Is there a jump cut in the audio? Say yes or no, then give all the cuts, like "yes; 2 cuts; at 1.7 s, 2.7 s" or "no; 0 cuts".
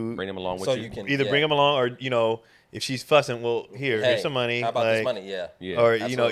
no; 0 cuts